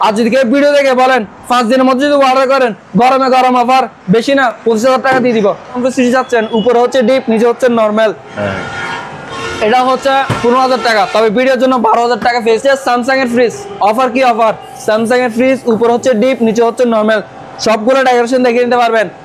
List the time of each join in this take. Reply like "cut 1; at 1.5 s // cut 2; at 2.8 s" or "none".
cut 1; at 5.8 s // cut 2; at 12.6 s